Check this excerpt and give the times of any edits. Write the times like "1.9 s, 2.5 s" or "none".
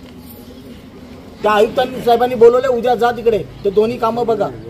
1.4 s